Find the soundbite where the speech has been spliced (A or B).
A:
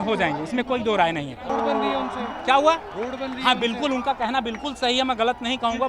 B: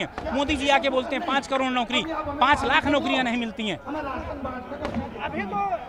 A